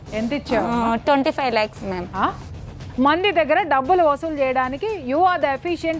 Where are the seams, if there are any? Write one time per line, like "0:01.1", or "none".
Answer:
0:02.5